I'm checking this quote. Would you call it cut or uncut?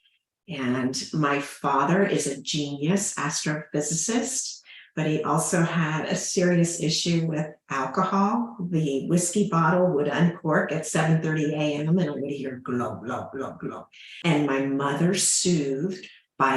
cut